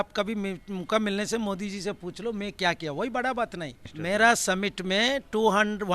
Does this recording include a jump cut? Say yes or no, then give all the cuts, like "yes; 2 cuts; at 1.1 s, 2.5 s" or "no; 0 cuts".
yes; 1 cut; at 3.9 s